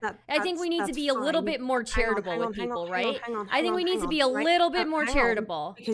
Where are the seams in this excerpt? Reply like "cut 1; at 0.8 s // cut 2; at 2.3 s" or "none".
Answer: none